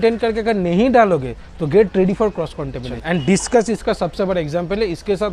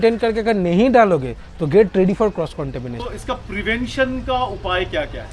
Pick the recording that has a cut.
second; 1 cut; at 2.9 s

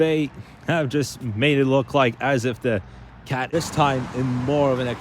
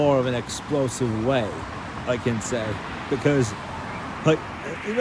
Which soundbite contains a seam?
first; 1 cut; at 3.5 s

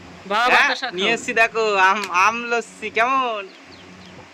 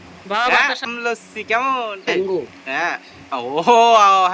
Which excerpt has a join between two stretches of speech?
second; 2 cuts; at 0.9 s, 2.2 s

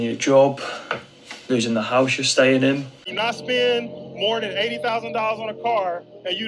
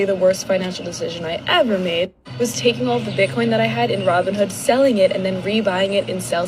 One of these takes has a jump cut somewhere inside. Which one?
first; 1 cut; at 3.0 s

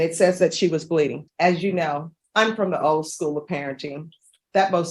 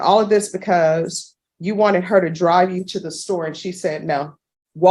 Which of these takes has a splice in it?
first; 2 cuts; at 1.2 s, 2.2 s

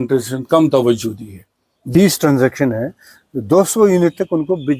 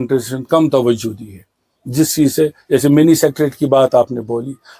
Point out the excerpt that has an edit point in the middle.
first; 1 cut; at 1.7 s

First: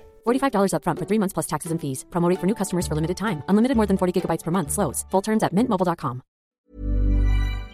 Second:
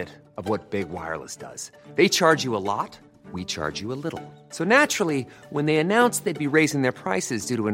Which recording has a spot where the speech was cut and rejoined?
first; 1 cut; at 6.6 s

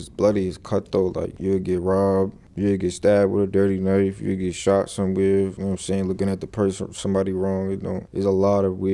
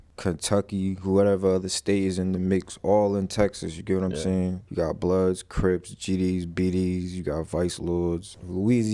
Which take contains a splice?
first; 3 cuts; at 1.3 s, 5.6 s, 8.0 s

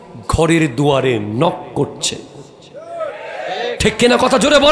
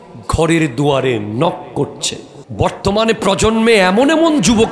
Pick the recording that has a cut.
second; 1 cut; at 2.4 s

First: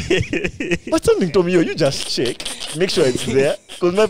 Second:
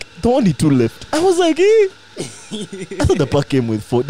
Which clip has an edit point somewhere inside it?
second; 1 cut; at 1.0 s

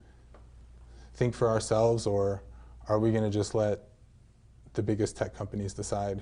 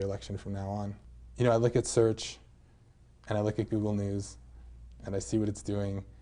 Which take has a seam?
second; 1 cut; at 1.0 s

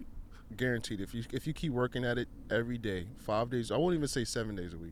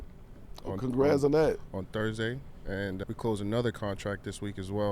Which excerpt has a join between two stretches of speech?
second; 1 cut; at 3.0 s

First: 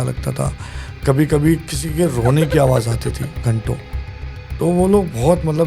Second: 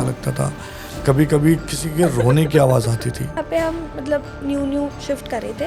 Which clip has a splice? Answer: second; 1 cut; at 3.4 s

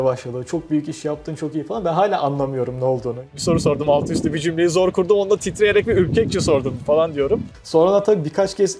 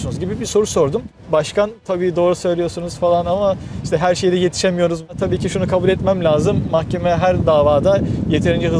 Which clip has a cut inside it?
second; 1 cut; at 1.1 s

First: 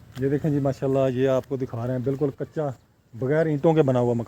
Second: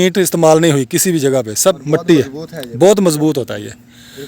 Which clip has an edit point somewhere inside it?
second; 1 cut; at 2.0 s

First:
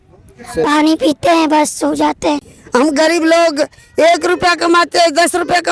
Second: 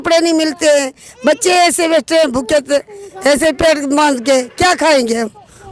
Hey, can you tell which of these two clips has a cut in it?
first; 1 cut; at 2.5 s

